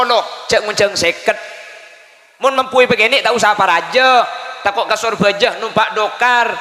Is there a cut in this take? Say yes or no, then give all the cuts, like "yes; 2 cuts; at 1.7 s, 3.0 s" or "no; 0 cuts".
no; 0 cuts